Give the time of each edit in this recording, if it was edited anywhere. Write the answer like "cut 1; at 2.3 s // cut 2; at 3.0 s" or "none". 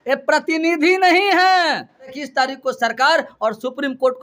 cut 1; at 2.2 s